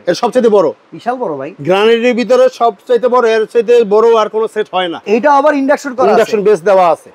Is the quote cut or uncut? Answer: cut